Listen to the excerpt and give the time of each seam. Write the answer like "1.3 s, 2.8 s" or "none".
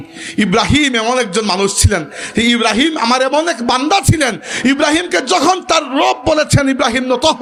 none

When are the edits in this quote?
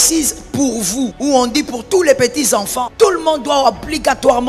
1.1 s, 2.8 s

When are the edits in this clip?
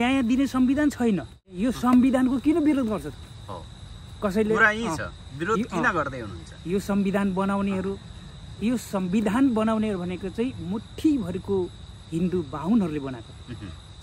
1.5 s

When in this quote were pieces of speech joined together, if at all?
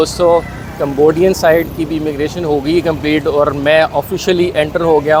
none

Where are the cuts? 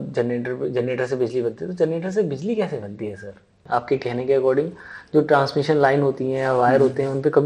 3.6 s

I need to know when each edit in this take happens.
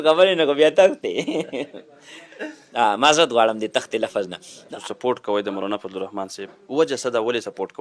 4.8 s

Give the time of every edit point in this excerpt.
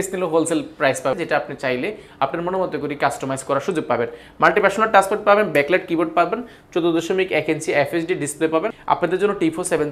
1.1 s, 8.8 s

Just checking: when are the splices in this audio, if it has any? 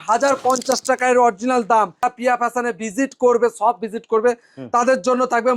2.0 s

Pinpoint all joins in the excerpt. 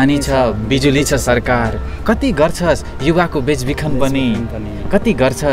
none

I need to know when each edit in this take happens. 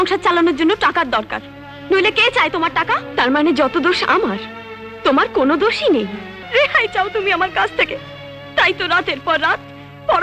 3.1 s, 6.3 s

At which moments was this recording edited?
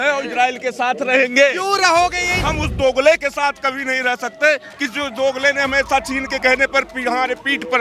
2.4 s

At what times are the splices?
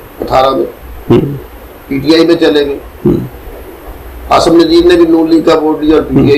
none

